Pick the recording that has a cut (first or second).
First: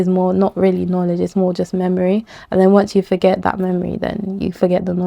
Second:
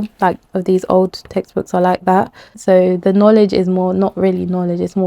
second